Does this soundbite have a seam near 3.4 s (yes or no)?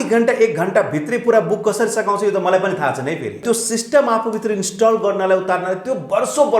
yes